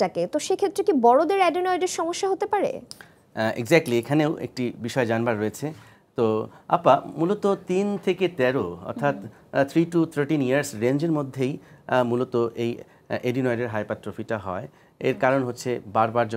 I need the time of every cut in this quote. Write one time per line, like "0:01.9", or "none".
none